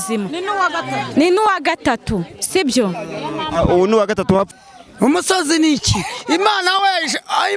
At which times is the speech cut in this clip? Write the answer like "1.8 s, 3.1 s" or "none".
4.5 s